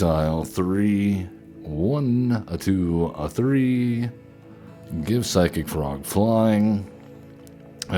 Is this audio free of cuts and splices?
yes; 0 cuts

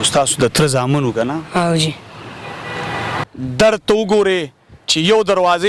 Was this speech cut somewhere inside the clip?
yes; 1 cut; at 3.2 s

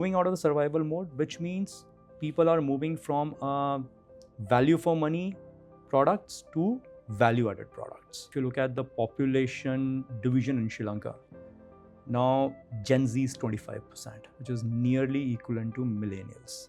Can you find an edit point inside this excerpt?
yes; 1 cut; at 8.2 s

